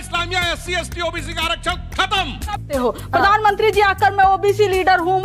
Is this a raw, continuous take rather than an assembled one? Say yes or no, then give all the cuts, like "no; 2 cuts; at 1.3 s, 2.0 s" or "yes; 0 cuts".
no; 1 cut; at 2.6 s